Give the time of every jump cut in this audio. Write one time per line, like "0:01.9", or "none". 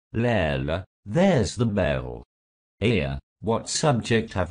0:00.9